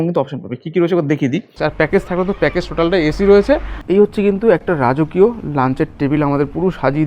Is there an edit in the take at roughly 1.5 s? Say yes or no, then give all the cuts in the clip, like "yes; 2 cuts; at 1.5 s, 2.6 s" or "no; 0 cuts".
yes; 2 cuts; at 1.5 s, 3.7 s